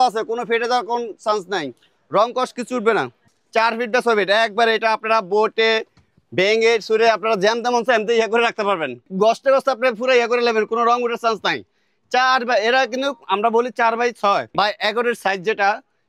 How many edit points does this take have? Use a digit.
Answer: 3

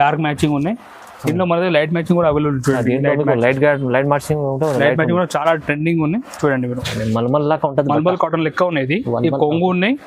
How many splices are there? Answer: 1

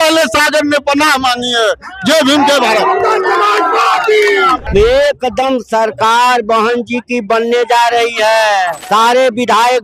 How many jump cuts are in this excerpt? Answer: 2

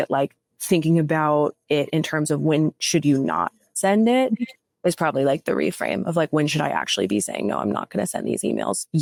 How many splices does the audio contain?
0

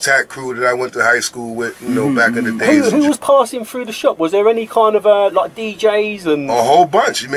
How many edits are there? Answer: 1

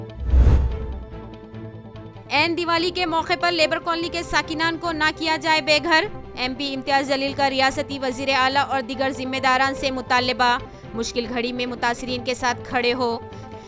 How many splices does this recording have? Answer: 1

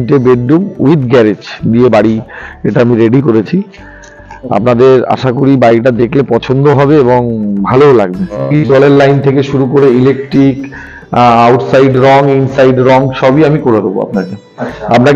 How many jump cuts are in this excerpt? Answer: 1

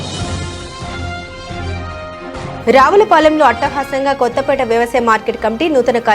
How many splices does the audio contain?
1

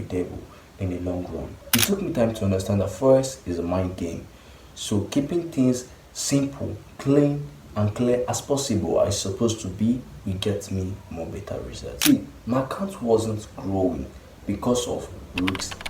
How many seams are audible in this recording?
2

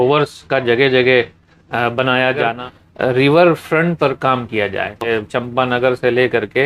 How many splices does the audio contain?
2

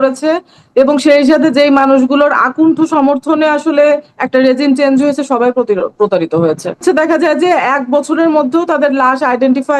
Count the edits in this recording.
1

